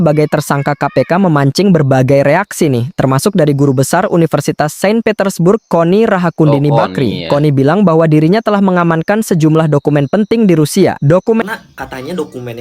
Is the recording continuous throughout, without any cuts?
no; 1 cut; at 11.4 s

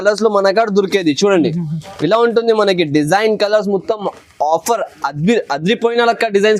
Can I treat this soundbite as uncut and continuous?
yes; 0 cuts

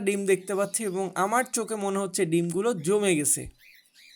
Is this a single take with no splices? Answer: yes; 0 cuts

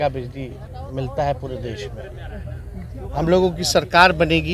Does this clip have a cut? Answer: no; 0 cuts

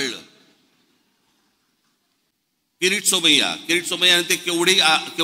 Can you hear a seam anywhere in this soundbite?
yes; 1 cut; at 2.9 s

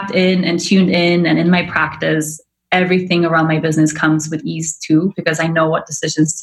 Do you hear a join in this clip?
no; 0 cuts

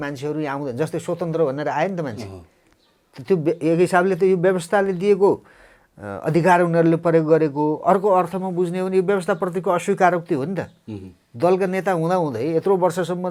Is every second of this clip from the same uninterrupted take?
yes; 0 cuts

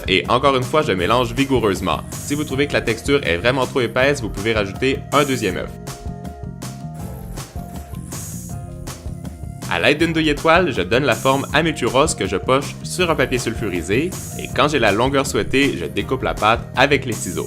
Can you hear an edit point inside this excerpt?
yes; 1 cut; at 11.5 s

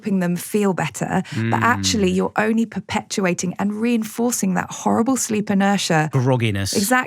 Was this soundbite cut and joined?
yes; 1 cut; at 6.2 s

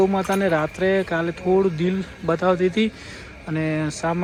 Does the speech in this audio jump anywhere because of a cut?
no; 0 cuts

